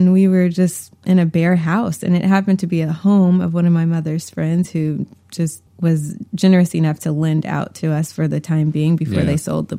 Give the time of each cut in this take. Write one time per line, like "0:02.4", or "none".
0:05.6